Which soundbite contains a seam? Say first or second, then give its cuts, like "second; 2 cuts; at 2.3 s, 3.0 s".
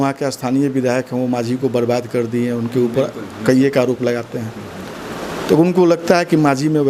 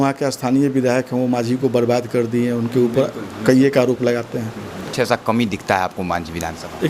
second; 1 cut; at 4.9 s